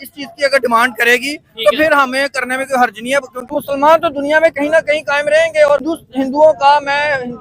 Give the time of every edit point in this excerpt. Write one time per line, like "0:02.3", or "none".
0:03.4
0:05.9